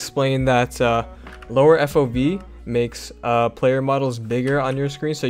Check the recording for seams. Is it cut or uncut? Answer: uncut